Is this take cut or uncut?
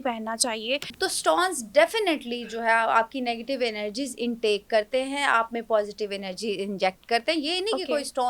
cut